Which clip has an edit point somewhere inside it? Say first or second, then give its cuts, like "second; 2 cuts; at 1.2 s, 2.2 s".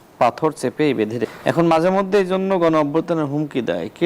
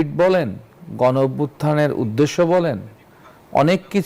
first; 1 cut; at 1.3 s